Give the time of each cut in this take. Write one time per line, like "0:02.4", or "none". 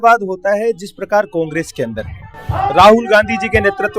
none